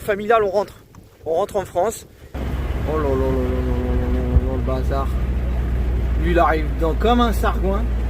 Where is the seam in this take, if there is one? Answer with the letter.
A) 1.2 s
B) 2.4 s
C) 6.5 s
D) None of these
B